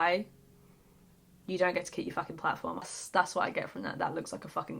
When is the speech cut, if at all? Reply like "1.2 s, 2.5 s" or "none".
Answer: 2.8 s